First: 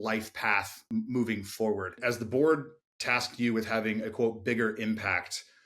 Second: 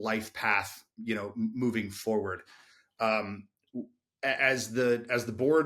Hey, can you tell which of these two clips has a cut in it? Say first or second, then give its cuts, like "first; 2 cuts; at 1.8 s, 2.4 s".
first; 2 cuts; at 0.8 s, 2.0 s